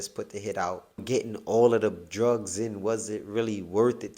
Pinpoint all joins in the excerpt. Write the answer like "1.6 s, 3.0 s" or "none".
1.0 s